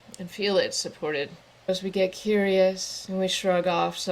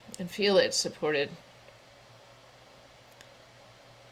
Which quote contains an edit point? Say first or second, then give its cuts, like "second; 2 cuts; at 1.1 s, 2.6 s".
first; 2 cuts; at 1.4 s, 2.9 s